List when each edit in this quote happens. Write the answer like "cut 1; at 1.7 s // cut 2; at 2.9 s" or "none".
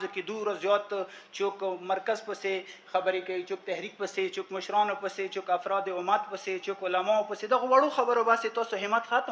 none